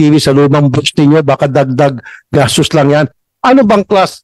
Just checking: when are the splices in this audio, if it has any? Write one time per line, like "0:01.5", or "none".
none